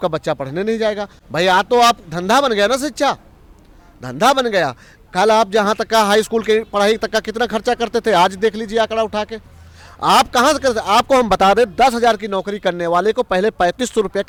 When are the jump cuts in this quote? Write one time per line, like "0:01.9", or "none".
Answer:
none